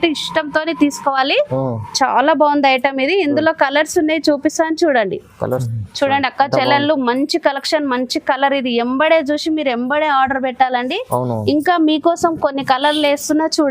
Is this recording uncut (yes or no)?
no